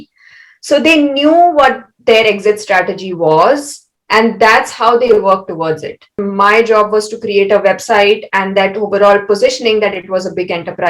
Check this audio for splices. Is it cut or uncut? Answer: cut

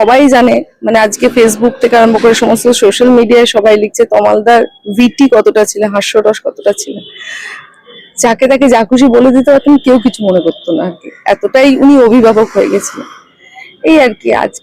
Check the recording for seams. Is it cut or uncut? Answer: uncut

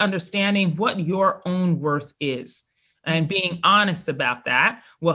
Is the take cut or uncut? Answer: uncut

